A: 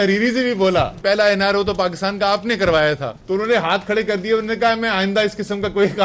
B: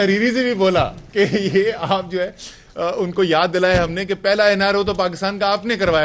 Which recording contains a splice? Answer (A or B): A